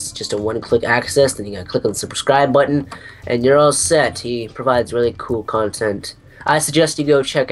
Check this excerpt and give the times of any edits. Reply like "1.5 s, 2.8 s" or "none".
3.7 s